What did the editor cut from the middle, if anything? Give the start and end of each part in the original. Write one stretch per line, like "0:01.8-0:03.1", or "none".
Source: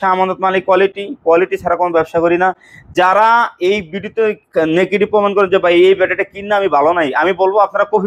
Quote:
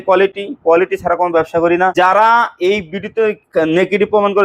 0:02.5-0:02.9